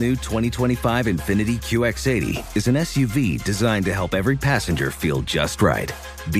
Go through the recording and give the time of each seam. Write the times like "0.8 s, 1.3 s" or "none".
none